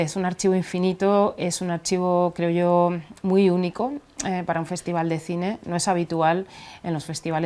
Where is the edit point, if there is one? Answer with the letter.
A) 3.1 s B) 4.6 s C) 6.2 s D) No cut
D